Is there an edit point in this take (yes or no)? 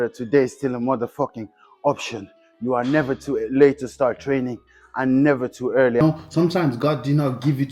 yes